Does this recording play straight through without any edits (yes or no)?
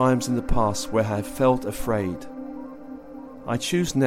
yes